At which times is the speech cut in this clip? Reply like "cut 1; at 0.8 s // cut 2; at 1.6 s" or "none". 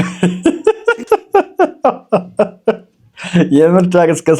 none